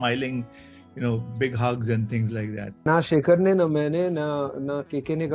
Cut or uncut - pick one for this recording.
cut